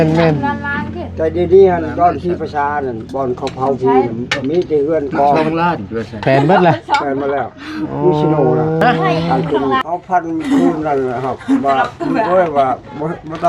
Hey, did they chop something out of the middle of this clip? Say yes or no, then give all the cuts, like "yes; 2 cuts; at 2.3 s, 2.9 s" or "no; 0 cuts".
yes; 1 cut; at 9.8 s